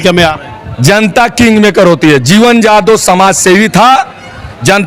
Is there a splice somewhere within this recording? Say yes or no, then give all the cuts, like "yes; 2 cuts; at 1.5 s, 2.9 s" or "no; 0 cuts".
no; 0 cuts